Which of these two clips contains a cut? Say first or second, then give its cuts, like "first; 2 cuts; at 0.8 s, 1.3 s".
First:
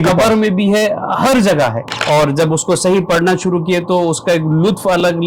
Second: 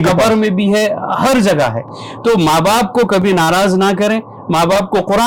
first; 1 cut; at 1.9 s